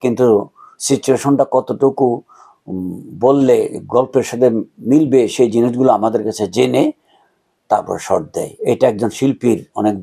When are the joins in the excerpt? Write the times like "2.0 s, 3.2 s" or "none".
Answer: none